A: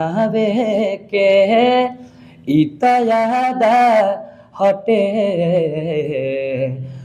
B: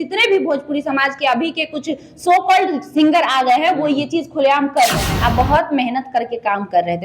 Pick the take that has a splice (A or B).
B